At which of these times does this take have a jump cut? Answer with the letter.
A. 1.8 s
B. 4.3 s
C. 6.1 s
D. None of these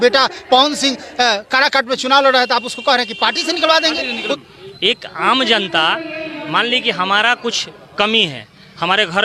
B